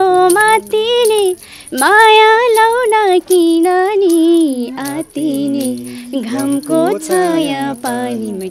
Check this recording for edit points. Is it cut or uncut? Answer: uncut